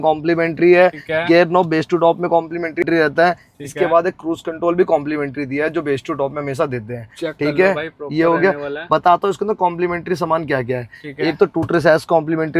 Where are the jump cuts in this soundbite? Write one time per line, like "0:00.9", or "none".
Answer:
none

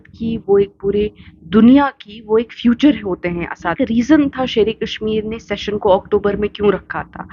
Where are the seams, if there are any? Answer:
0:03.7

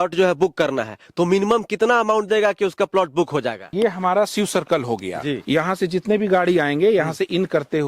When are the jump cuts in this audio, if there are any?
0:03.7
0:05.4

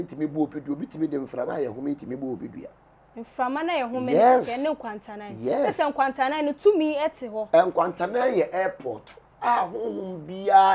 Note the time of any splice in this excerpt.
none

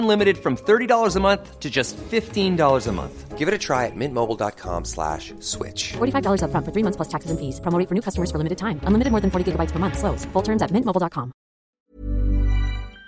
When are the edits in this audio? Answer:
0:11.8

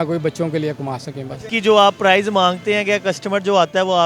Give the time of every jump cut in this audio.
0:01.5

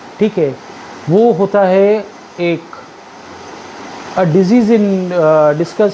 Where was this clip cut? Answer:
none

